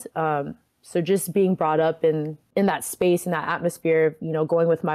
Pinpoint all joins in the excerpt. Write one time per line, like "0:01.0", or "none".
0:02.5